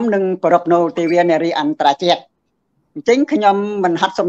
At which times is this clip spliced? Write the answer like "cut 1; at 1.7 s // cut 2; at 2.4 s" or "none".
none